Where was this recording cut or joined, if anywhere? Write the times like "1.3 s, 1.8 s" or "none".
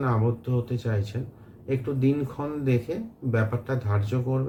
none